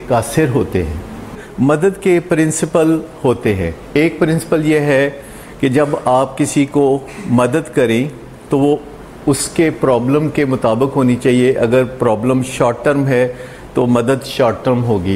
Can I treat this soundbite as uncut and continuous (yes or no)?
no